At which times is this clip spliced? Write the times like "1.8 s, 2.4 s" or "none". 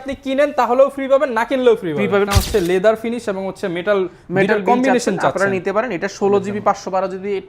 2.3 s